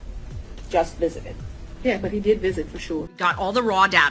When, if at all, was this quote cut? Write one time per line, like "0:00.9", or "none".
0:03.1